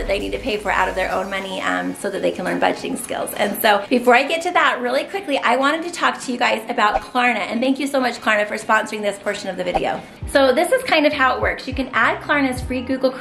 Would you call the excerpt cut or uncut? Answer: uncut